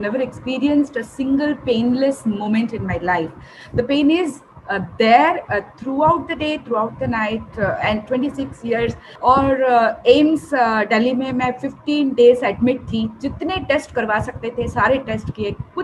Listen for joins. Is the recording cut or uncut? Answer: uncut